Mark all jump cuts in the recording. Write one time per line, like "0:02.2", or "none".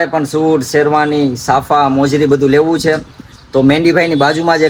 none

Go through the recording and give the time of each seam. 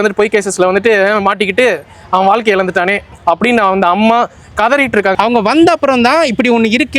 0:05.1

